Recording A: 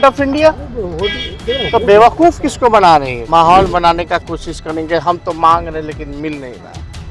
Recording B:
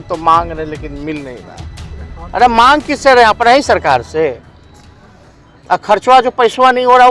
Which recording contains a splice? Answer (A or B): A